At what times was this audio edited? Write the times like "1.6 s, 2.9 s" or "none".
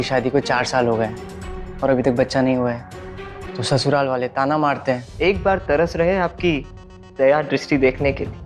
5.1 s